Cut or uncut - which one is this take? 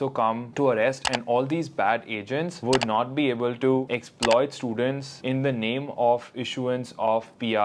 uncut